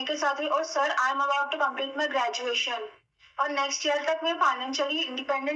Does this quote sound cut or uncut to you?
uncut